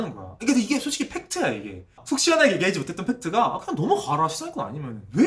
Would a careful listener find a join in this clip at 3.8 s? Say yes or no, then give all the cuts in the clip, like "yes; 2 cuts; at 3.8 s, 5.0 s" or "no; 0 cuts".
no; 0 cuts